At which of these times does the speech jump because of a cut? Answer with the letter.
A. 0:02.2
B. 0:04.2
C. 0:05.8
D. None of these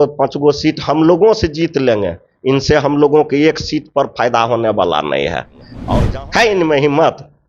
C